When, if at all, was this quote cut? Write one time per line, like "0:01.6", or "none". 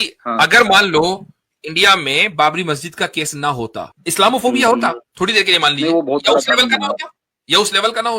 0:03.9
0:05.1